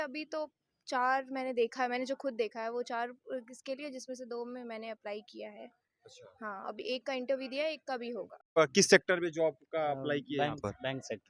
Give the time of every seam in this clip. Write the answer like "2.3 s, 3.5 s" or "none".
8.6 s